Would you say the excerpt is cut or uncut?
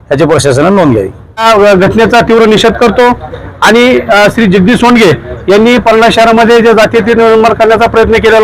cut